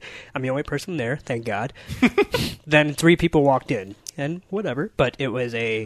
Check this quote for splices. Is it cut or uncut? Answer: uncut